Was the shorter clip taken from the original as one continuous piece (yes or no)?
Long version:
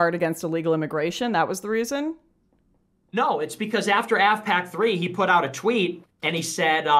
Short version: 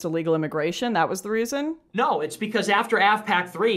no